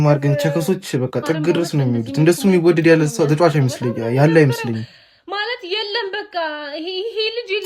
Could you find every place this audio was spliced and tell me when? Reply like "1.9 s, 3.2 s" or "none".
none